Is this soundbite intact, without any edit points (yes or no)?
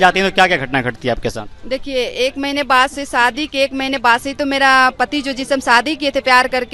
yes